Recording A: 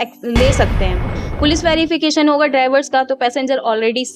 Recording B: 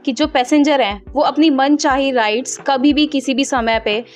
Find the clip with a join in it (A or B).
A